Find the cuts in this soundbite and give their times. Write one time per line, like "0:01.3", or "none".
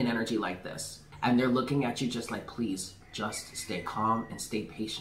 0:01.1